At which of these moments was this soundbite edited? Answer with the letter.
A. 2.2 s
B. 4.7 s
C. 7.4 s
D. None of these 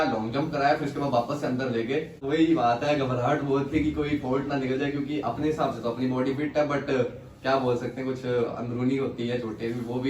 A